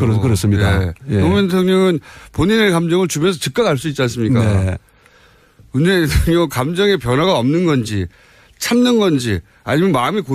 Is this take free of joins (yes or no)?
no